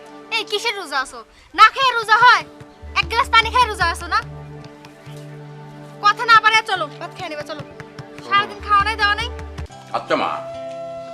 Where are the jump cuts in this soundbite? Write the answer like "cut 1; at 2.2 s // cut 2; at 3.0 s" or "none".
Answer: cut 1; at 9.7 s

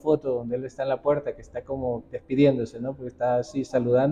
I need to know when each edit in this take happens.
none

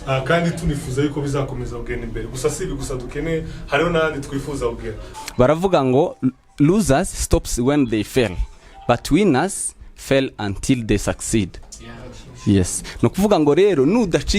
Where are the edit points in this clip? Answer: cut 1; at 5.1 s

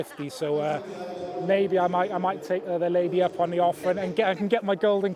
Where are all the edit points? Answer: none

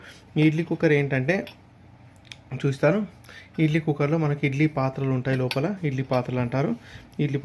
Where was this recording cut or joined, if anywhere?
none

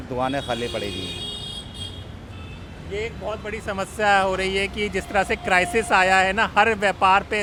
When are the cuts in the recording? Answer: none

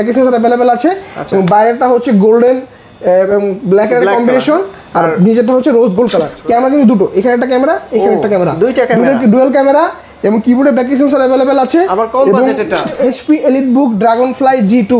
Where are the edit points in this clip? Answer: cut 1; at 6.3 s // cut 2; at 13.0 s

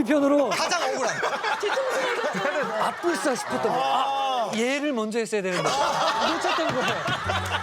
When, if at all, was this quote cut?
none

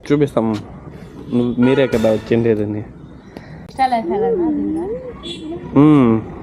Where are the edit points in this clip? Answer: cut 1; at 3.7 s

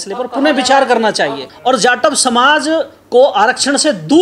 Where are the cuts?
cut 1; at 1.5 s

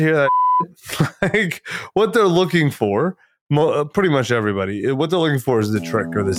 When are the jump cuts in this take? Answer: none

